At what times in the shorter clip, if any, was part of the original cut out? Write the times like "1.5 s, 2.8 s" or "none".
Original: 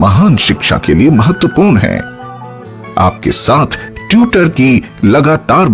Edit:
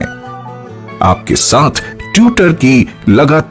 none